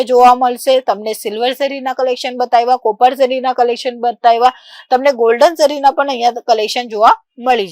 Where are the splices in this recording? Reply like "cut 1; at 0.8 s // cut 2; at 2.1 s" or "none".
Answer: none